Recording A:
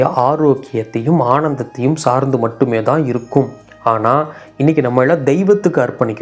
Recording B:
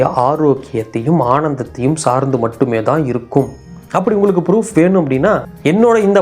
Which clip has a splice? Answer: B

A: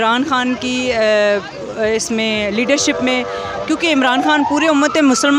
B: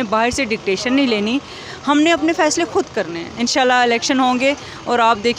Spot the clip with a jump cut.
B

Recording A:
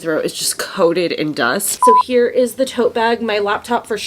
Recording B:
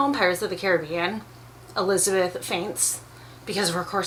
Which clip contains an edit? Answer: A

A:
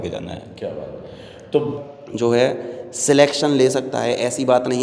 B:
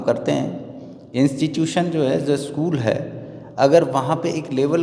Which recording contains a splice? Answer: A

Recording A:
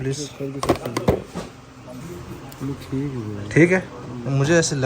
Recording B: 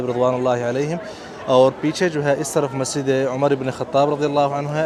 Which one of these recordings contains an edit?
A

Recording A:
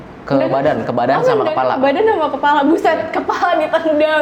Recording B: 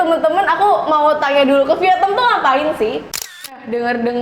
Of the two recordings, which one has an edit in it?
B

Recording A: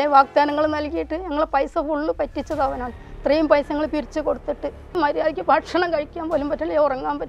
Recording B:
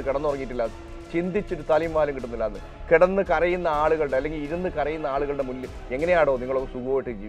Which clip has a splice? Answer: A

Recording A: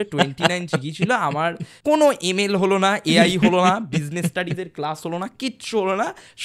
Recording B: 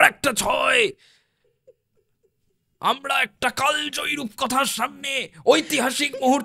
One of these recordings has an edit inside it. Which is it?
A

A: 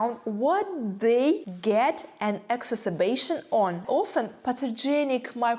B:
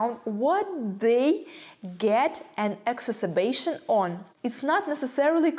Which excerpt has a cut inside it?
A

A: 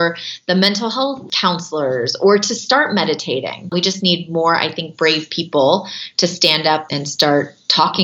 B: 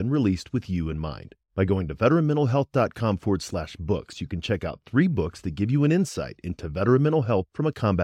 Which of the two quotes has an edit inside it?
A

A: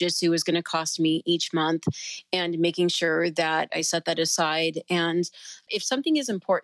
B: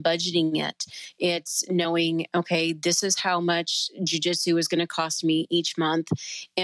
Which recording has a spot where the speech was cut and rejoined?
A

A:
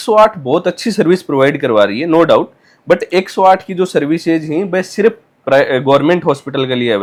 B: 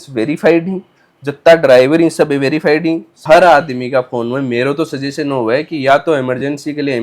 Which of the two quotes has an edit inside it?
B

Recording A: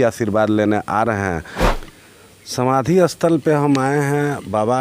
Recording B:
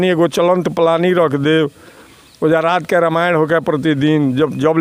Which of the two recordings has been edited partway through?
A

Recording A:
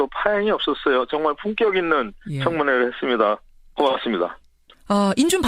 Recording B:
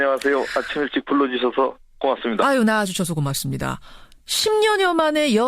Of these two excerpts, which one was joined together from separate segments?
B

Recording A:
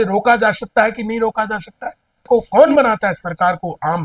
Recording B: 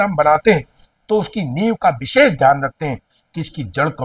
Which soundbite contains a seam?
A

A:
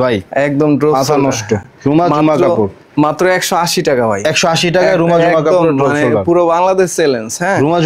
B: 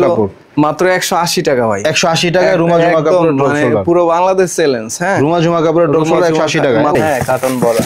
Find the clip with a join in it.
B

